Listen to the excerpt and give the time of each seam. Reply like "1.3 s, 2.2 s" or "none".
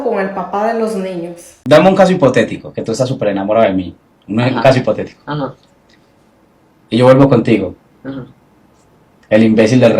1.5 s